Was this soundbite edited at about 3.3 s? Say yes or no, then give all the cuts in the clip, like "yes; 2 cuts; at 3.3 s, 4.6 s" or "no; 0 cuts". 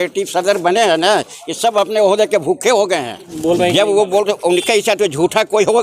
yes; 1 cut; at 3.3 s